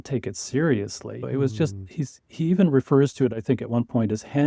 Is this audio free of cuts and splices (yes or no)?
yes